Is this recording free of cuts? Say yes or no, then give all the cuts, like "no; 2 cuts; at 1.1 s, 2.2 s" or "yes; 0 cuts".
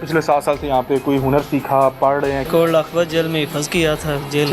no; 1 cut; at 2.5 s